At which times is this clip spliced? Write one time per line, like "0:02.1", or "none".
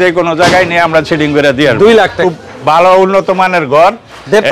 0:02.2